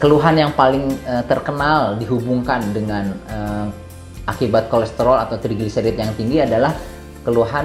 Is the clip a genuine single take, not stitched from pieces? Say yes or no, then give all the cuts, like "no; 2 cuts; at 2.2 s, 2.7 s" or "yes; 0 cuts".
yes; 0 cuts